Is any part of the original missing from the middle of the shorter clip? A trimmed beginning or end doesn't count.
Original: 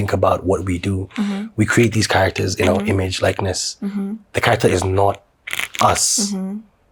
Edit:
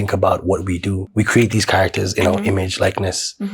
yes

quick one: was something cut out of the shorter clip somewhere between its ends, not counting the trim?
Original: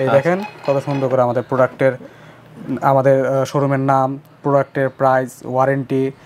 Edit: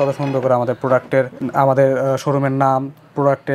yes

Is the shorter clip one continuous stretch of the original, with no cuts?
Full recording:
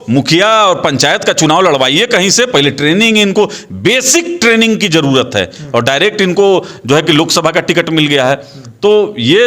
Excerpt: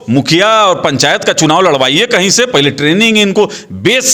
yes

